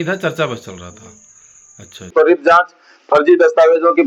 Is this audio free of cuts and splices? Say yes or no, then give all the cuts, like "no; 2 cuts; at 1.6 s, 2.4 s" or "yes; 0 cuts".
no; 1 cut; at 2.1 s